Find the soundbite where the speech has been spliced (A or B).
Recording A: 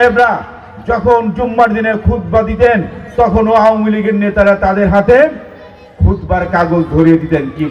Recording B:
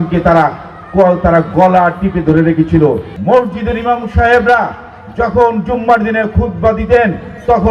B